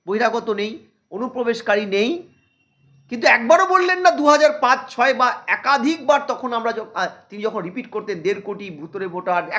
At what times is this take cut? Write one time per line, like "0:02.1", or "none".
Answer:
none